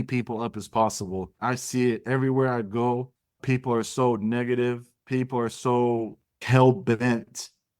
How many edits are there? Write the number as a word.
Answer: three